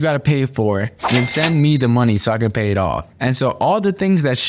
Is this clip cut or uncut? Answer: cut